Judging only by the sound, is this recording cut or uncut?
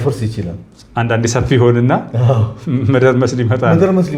uncut